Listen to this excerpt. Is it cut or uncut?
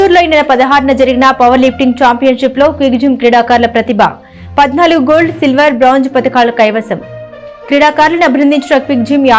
uncut